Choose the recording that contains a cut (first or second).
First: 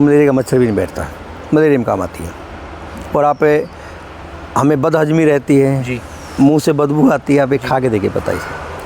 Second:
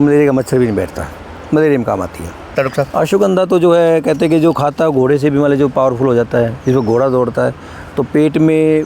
second